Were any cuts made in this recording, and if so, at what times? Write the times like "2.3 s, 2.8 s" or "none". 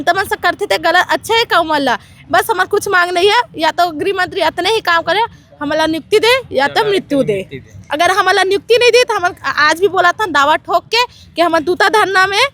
none